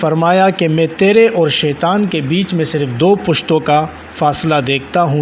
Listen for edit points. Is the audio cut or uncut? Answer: uncut